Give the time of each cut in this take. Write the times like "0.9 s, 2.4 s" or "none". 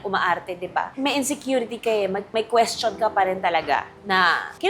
0.9 s